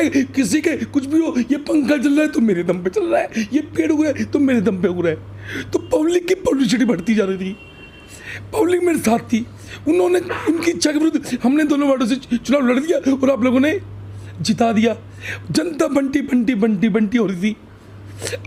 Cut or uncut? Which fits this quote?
uncut